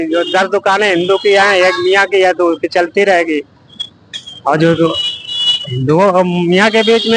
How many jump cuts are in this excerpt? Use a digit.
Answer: 0